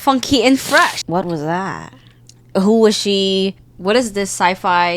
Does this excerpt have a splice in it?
yes; 3 cuts; at 1.0 s, 2.4 s, 3.7 s

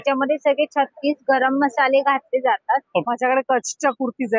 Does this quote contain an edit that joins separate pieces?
yes; 1 cut; at 3.1 s

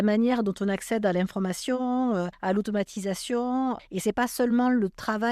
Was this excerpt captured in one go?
no; 1 cut; at 3.9 s

